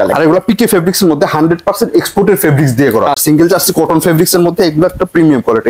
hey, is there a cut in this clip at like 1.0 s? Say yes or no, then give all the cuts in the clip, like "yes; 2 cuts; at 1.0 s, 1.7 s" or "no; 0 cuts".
no; 1 cut; at 3.2 s